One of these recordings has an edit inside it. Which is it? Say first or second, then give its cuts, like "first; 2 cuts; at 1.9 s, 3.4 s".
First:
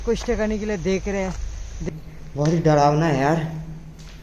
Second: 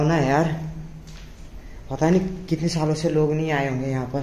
first; 1 cut; at 1.8 s